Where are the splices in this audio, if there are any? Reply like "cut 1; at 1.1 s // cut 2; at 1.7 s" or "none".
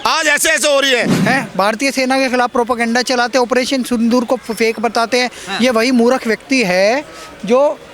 cut 1; at 1.1 s